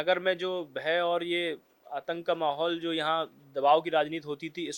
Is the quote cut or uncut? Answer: uncut